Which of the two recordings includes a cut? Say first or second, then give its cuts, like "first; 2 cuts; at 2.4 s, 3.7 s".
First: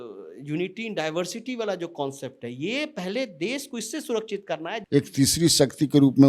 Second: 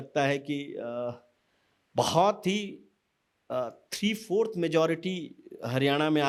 first; 1 cut; at 4.8 s